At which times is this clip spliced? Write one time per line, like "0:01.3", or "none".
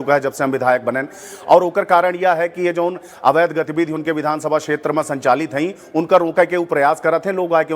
none